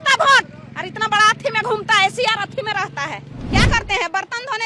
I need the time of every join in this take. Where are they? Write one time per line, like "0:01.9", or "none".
0:03.3

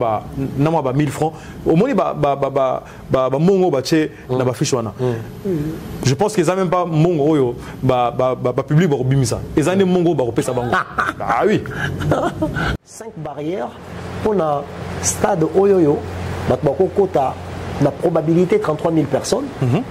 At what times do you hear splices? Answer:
0:12.7

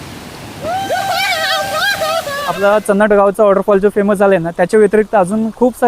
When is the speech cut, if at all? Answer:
0:02.4

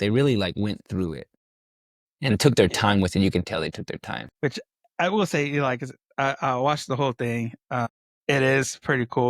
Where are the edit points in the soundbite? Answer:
0:08.1

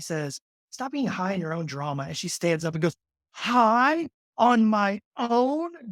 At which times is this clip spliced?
none

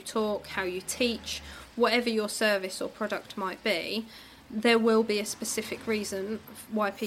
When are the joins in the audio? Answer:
none

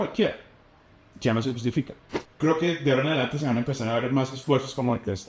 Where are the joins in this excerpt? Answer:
0:02.4

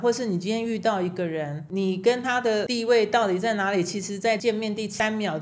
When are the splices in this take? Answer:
0:01.6
0:02.7
0:04.6

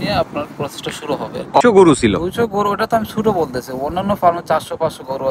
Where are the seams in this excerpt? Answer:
0:01.6

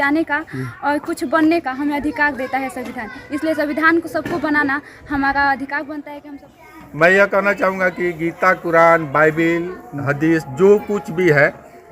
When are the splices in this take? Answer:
0:06.1

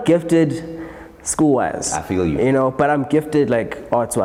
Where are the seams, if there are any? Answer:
none

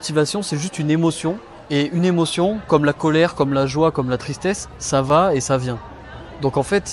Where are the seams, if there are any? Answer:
0:01.5

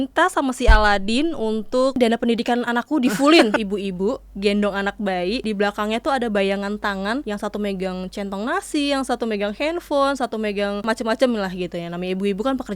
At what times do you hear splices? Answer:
0:02.0
0:03.6
0:05.4
0:07.2
0:10.8

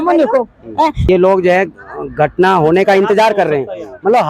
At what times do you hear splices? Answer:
0:01.0

